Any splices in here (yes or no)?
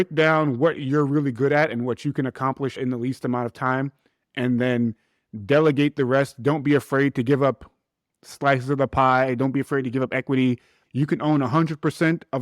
yes